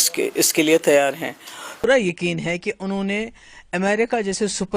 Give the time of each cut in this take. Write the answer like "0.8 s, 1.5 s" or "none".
1.8 s